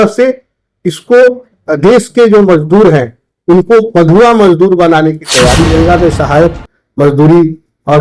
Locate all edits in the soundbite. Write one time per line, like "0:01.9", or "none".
0:01.5
0:05.7